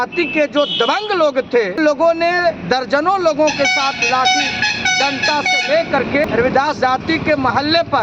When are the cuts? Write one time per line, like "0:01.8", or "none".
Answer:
0:01.8
0:06.2